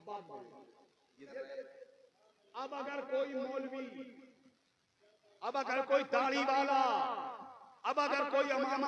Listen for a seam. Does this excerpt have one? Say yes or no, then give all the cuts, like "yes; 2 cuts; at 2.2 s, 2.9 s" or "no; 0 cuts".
yes; 1 cut; at 1.3 s